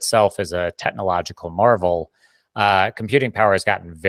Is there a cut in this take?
no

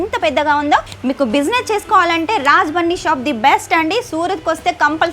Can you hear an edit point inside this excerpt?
yes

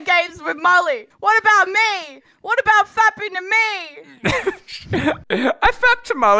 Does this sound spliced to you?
yes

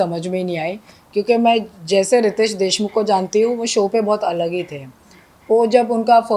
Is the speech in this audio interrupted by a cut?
no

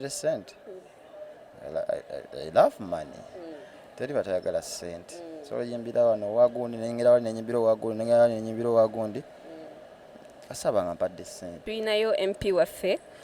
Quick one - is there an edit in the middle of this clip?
yes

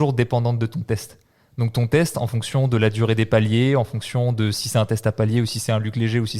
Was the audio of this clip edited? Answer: no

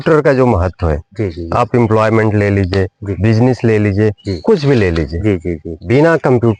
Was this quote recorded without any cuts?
yes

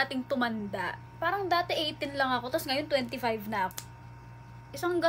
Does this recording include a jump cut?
yes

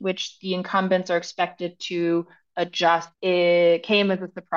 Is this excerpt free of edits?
no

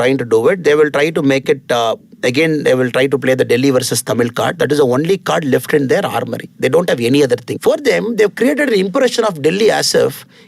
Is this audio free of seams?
no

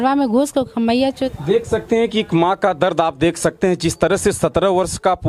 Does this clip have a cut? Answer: yes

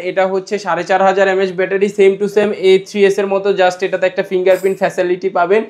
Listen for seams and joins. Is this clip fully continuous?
yes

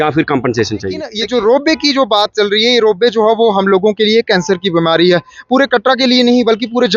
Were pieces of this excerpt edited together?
yes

